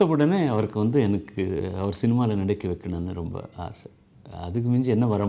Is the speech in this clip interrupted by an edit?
no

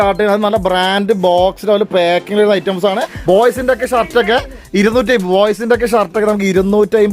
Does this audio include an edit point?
yes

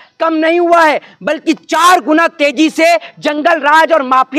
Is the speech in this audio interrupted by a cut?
no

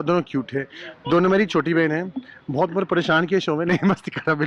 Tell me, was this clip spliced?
no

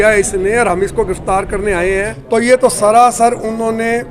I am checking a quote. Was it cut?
yes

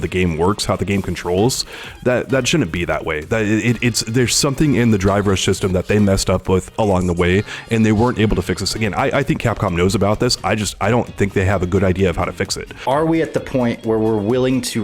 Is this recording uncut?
no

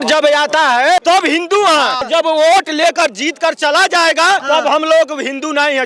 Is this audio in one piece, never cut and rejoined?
no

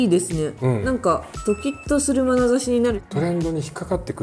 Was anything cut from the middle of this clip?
yes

